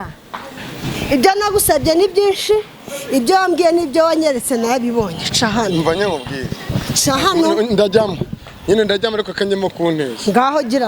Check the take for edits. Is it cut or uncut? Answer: uncut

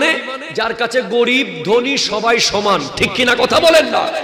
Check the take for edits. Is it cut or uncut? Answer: uncut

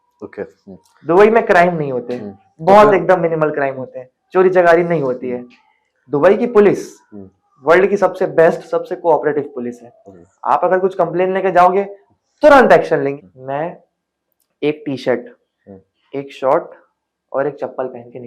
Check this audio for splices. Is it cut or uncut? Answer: cut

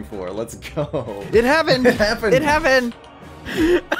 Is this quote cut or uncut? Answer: cut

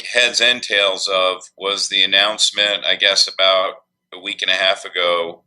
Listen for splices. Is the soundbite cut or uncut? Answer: cut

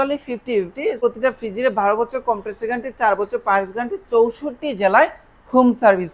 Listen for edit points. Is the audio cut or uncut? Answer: cut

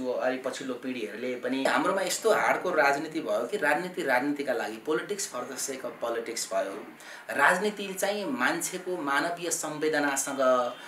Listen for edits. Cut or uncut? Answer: cut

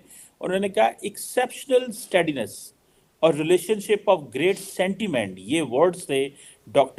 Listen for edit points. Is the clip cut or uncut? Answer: uncut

